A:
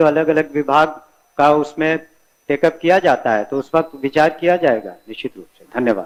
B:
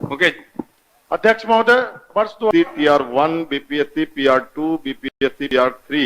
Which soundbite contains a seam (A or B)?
B